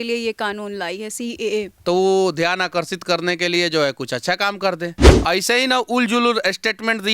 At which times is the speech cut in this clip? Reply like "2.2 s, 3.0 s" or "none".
1.7 s, 5.1 s